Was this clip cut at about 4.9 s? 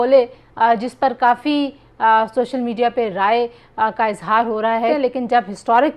yes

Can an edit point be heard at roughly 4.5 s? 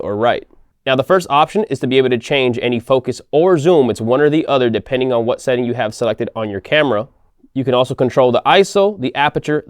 no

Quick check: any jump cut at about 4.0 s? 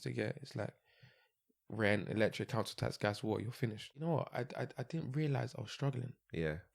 yes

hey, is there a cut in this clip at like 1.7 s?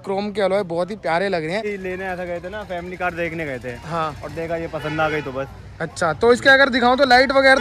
yes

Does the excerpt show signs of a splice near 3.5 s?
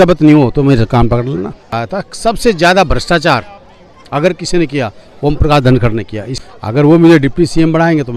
no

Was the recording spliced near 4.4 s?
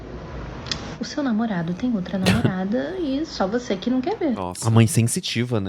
yes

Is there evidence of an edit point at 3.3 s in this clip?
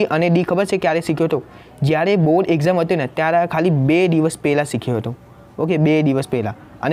no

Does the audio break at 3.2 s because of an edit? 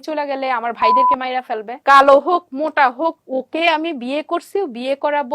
yes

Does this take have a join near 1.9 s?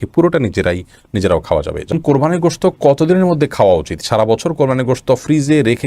yes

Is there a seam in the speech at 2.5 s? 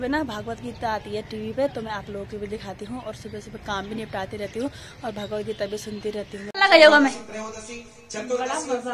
no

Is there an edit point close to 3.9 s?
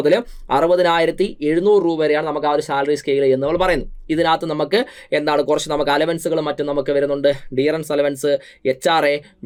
no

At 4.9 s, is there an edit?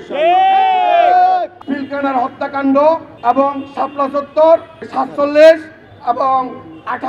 yes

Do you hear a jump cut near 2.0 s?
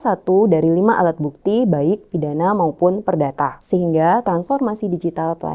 no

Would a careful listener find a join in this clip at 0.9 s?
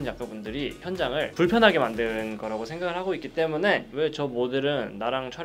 yes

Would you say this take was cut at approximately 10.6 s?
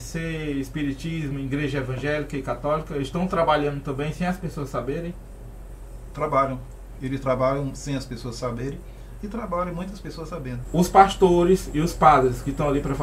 yes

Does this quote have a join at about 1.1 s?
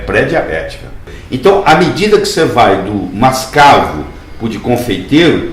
yes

